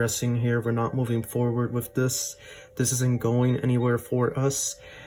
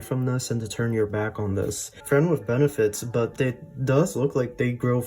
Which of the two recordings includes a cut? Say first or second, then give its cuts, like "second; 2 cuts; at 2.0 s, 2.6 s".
second; 1 cut; at 1.9 s